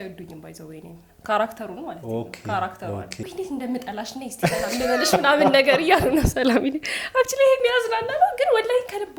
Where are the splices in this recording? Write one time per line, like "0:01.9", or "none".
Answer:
0:03.2